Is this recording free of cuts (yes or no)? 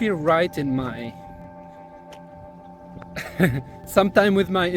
yes